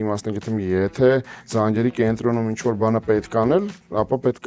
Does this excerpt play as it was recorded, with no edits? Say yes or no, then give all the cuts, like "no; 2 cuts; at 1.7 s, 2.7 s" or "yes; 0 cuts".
yes; 0 cuts